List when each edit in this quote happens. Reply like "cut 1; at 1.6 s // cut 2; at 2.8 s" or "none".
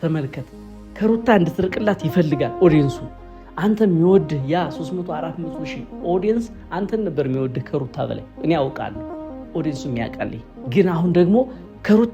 cut 1; at 10.5 s